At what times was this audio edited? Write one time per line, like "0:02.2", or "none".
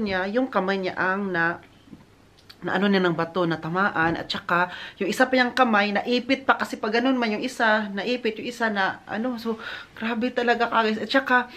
none